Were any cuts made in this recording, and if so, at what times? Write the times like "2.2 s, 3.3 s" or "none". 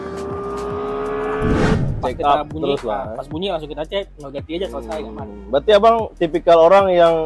1.7 s